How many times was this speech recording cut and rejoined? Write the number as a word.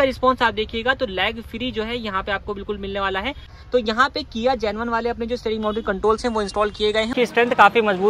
two